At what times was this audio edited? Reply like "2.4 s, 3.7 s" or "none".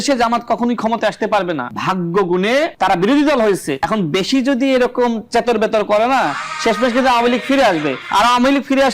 1.7 s, 2.7 s, 3.7 s, 8.0 s